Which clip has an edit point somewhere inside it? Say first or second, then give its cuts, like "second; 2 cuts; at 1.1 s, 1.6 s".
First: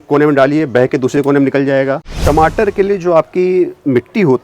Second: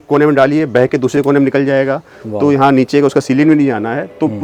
first; 1 cut; at 2.1 s